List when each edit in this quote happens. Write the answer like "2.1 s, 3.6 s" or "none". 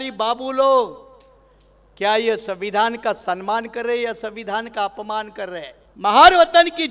5.8 s